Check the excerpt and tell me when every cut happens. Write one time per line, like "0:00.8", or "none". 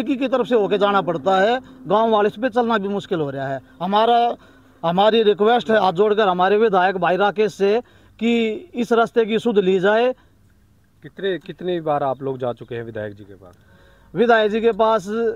none